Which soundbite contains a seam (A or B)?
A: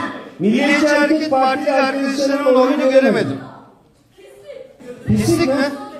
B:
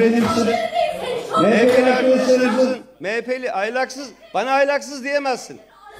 A